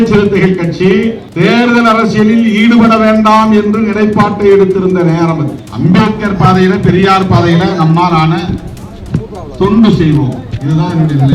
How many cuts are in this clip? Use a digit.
2